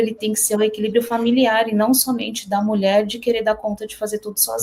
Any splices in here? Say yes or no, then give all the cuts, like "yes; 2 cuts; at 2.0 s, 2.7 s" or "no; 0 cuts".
no; 0 cuts